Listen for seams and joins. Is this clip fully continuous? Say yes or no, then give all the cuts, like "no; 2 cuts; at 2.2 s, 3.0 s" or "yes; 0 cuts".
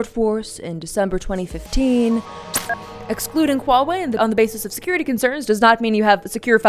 no; 2 cuts; at 2.7 s, 4.2 s